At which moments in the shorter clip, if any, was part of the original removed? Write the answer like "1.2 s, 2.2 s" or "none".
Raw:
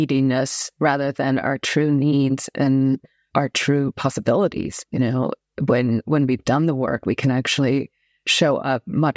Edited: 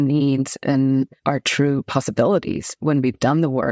1.2 s, 2.8 s